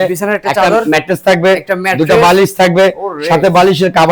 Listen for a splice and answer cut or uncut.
uncut